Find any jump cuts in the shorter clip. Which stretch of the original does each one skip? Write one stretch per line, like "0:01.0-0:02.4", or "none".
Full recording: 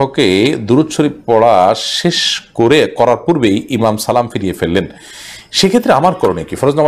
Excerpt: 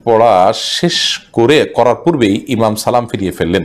none